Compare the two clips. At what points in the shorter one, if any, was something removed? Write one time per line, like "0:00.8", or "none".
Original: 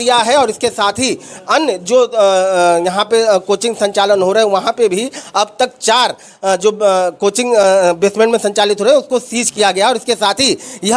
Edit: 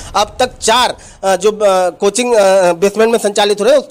none